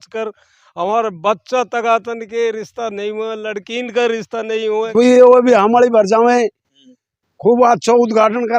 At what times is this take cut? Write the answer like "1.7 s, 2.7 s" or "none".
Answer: 4.9 s